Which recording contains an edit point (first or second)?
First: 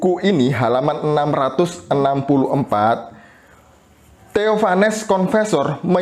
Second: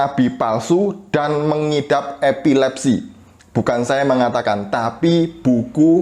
second